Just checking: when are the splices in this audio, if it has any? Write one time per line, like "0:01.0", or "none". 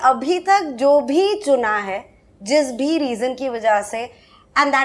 none